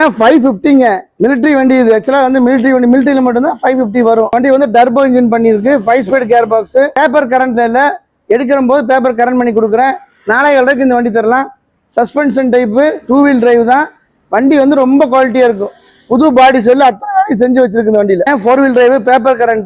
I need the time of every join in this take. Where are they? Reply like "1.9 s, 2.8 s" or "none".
none